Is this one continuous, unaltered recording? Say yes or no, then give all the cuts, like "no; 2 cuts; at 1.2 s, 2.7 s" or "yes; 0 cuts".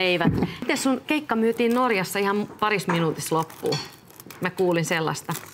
no; 1 cut; at 2.1 s